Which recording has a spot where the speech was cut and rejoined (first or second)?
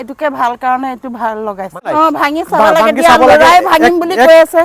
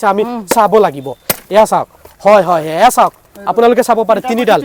first